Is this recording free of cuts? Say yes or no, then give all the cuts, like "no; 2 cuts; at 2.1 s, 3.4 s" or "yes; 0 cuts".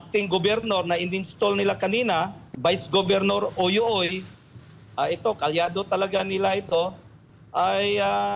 no; 1 cut; at 2.4 s